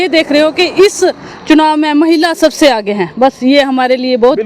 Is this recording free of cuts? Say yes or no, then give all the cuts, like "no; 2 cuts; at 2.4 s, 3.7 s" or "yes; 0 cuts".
yes; 0 cuts